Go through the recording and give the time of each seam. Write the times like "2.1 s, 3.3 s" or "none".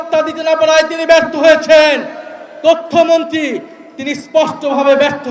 none